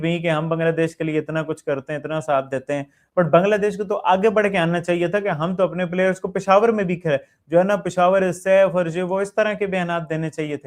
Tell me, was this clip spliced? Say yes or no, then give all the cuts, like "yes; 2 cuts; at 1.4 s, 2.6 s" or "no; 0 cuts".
no; 0 cuts